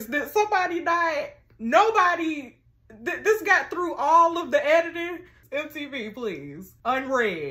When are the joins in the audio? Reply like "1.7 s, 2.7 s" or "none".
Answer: 5.3 s